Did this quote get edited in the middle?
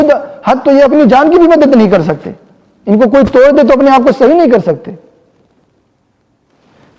no; 0 cuts

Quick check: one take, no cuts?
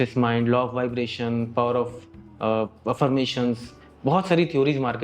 yes; 0 cuts

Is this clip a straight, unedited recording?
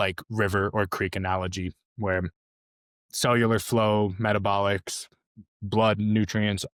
yes; 0 cuts

